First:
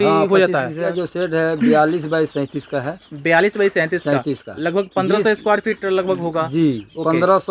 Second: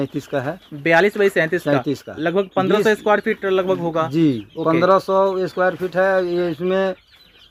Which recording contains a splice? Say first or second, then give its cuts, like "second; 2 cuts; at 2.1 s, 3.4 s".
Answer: first; 1 cut; at 0.9 s